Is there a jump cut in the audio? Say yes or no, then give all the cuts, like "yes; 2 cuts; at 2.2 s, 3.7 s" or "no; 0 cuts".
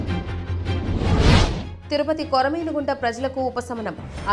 yes; 1 cut; at 1.7 s